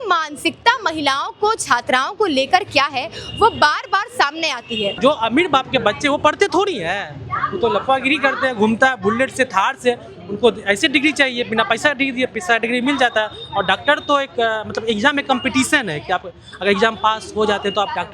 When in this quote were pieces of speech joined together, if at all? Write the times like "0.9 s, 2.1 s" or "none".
5.0 s

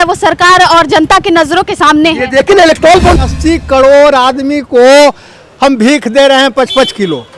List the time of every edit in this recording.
3.2 s

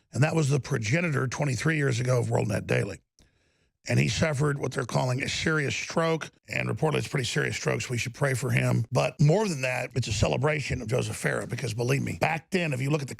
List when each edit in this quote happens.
6.4 s, 9.0 s, 9.9 s, 12.1 s

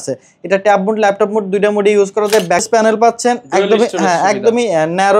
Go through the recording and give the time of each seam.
2.8 s

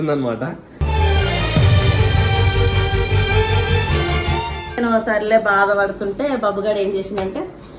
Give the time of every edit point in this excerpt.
4.8 s

